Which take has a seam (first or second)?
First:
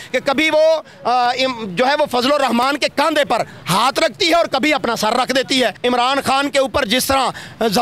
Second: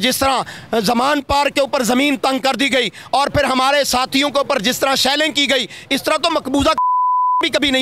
first